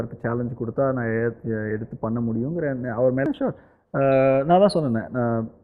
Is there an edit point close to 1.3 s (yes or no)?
no